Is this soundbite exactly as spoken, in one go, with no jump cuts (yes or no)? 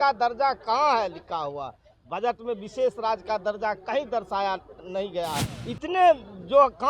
no